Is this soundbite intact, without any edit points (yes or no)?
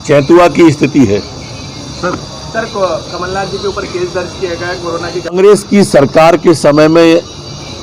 no